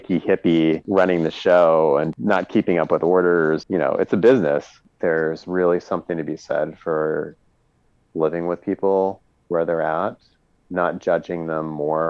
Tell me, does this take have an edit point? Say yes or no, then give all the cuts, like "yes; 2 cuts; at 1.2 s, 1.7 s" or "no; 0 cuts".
yes; 1 cut; at 4.8 s